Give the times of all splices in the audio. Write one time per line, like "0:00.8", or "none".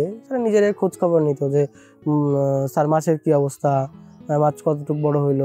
none